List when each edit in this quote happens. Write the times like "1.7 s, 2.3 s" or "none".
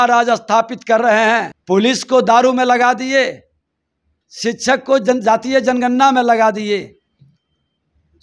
1.5 s